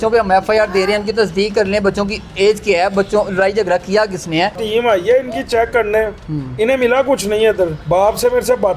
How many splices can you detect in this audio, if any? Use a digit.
2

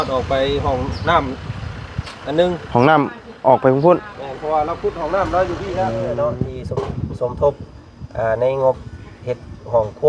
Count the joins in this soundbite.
1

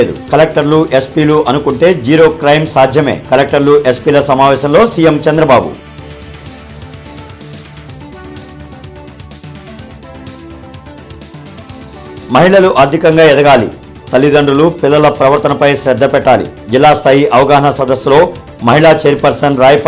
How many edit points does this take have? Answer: 0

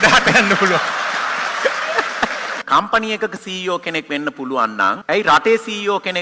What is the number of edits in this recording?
2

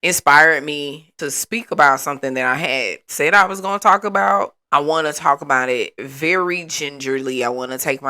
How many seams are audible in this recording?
1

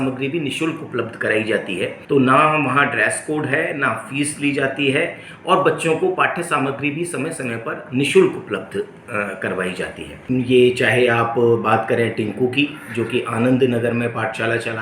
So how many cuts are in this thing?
2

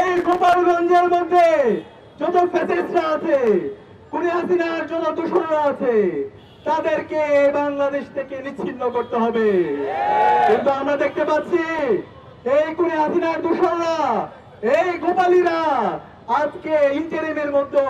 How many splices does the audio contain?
0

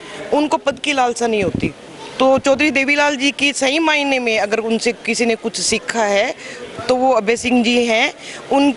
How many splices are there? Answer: 0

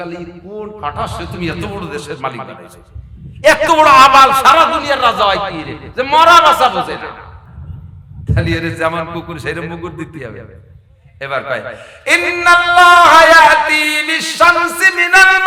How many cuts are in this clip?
0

